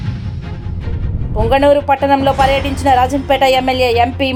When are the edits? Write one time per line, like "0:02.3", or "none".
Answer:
none